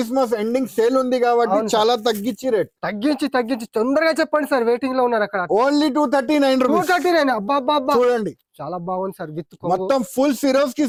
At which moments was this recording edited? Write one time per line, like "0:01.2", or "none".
none